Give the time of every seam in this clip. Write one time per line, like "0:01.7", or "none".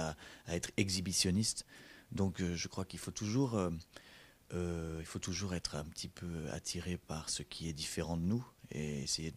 0:02.9